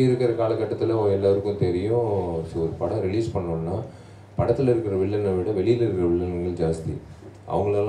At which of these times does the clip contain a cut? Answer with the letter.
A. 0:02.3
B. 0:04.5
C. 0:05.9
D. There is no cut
D